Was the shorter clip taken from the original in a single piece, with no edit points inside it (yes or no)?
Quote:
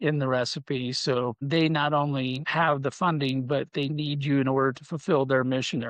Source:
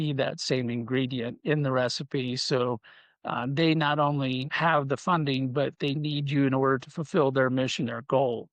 no